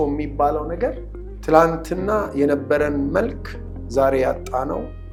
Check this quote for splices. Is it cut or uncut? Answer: uncut